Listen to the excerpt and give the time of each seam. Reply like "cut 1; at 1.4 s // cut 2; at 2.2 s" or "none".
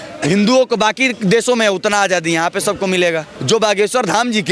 cut 1; at 3.3 s